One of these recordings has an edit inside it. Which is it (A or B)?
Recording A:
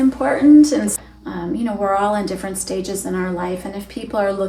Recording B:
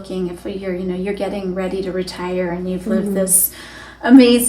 A